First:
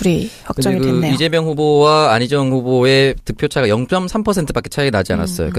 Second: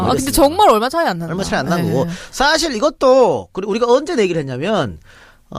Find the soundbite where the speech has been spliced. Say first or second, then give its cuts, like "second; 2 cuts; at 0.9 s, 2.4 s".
second; 1 cut; at 4.1 s